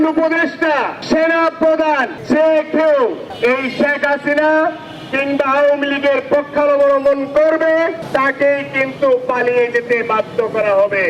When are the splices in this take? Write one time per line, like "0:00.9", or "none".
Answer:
0:01.0
0:02.1
0:03.3
0:08.0